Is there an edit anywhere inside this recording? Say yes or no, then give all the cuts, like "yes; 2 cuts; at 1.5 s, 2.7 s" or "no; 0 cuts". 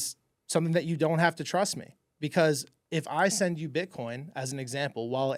no; 0 cuts